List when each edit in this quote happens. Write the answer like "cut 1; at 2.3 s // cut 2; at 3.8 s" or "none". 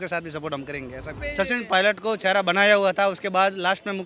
cut 1; at 1.2 s